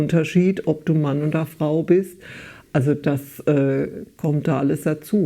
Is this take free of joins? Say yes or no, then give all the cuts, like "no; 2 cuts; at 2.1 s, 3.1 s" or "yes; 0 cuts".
yes; 0 cuts